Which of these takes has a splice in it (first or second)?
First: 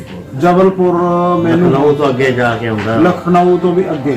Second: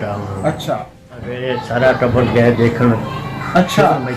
second